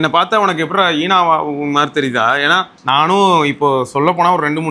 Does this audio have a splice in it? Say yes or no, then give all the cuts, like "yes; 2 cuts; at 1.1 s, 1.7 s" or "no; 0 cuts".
yes; 1 cut; at 2.7 s